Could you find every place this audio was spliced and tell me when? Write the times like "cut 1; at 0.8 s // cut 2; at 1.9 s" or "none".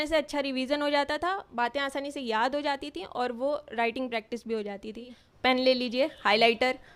cut 1; at 5.2 s